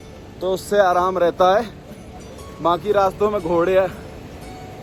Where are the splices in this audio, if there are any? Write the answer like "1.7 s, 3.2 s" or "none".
none